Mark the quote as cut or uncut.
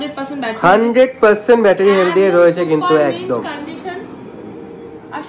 uncut